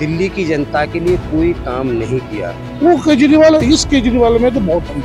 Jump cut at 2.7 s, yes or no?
yes